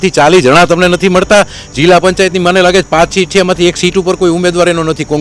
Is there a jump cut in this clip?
no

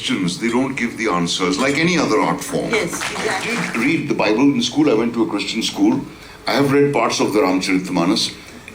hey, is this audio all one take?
no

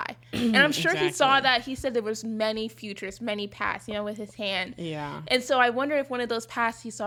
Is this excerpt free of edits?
yes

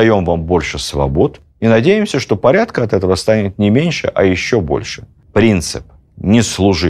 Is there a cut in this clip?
yes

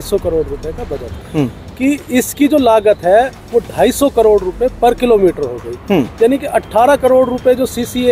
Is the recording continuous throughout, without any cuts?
no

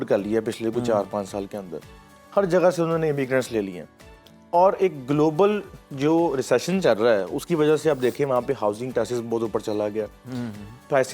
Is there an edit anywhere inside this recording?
no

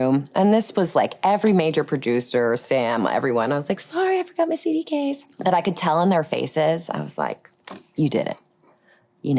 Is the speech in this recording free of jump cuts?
yes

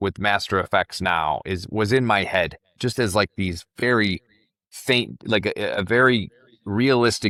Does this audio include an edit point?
no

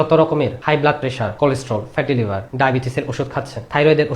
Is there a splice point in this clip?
yes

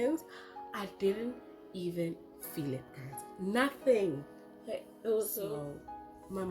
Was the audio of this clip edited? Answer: yes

